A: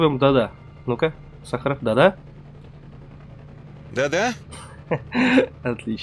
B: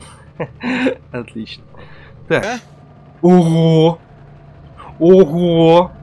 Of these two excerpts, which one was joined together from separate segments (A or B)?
B